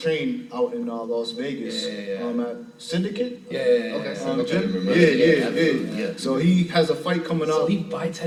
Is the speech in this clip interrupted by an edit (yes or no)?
no